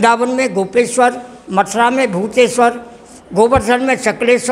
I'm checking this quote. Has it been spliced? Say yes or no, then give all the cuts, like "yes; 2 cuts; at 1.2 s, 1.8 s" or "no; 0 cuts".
no; 0 cuts